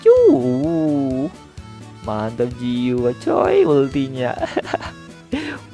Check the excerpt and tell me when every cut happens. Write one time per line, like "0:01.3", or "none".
none